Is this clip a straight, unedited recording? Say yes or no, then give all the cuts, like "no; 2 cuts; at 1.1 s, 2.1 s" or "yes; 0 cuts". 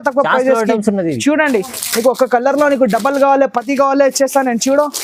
yes; 0 cuts